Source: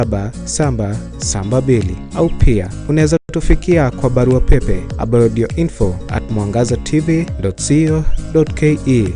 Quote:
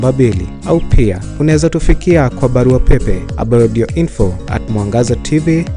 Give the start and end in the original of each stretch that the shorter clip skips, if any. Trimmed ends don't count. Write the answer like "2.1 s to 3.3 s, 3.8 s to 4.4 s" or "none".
3.3 s to 3.4 s